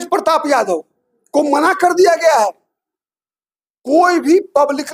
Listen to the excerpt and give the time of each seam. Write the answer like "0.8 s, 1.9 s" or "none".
none